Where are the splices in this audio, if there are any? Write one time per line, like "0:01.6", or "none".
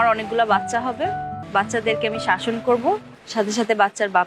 0:01.4
0:03.2